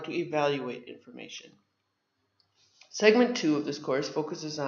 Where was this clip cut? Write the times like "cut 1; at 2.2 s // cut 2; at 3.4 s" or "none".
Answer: cut 1; at 3.1 s